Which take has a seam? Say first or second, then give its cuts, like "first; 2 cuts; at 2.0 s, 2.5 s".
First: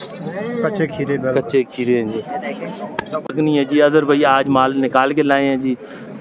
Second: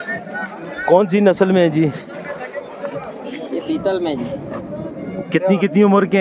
first; 1 cut; at 3.3 s